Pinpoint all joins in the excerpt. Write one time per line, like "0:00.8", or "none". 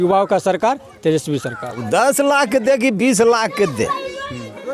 0:01.8